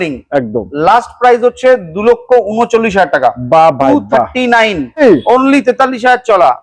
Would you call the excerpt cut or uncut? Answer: cut